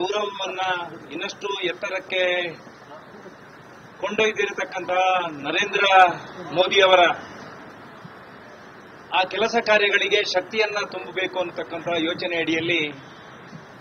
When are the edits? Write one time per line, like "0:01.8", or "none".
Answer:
none